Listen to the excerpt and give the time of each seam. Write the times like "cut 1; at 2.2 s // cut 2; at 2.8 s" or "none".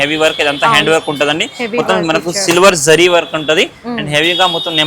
none